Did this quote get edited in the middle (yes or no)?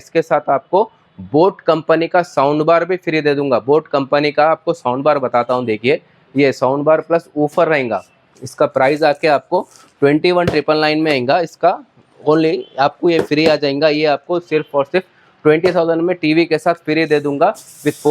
no